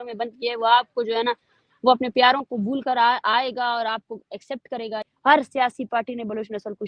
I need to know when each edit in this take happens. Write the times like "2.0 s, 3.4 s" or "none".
5.1 s